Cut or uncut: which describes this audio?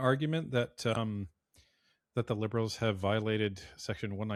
uncut